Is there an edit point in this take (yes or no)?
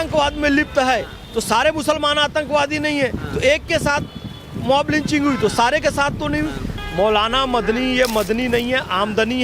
yes